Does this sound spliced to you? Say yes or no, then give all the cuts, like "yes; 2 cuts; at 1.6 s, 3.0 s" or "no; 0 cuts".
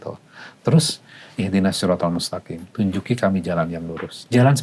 no; 0 cuts